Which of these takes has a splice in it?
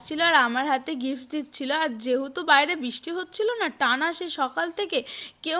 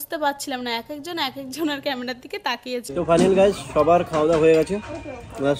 second; 1 cut; at 2.9 s

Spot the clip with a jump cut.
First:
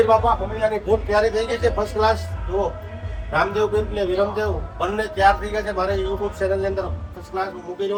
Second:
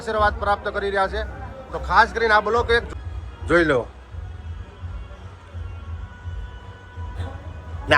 second; 1 cut; at 2.9 s

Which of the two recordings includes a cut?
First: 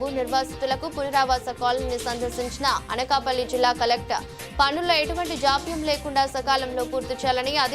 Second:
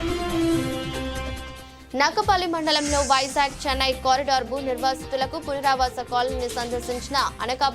second; 1 cut; at 0.9 s

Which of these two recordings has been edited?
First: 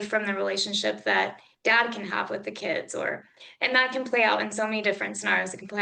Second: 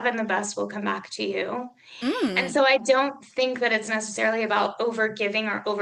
first; 1 cut; at 1.5 s

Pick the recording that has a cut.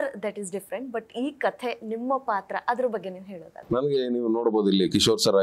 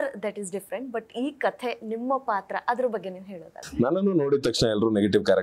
second; 1 cut; at 3.5 s

